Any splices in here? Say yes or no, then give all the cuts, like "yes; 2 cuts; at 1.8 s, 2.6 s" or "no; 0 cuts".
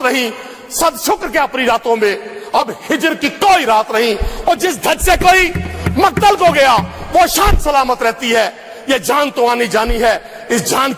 no; 0 cuts